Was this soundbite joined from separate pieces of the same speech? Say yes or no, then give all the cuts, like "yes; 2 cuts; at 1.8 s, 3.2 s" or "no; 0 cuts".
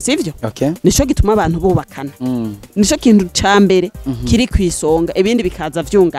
no; 0 cuts